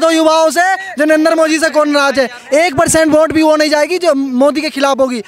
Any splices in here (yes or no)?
no